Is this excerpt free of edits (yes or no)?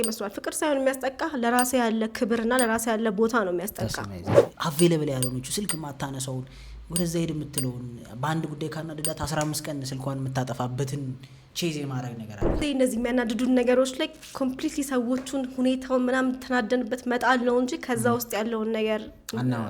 no